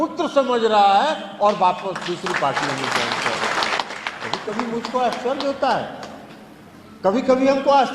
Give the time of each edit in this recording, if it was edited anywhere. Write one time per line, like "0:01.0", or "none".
0:03.8